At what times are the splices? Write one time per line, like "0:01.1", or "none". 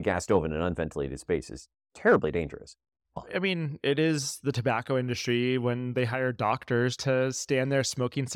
0:03.1